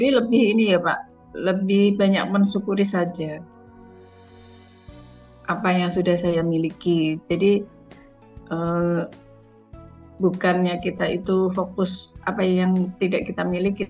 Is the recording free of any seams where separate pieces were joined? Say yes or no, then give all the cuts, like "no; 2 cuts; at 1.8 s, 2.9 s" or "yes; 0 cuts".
yes; 0 cuts